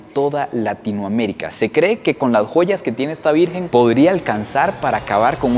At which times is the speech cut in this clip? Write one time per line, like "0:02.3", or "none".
none